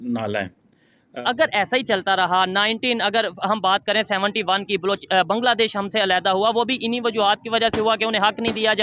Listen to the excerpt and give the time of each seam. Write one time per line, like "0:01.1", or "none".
0:01.1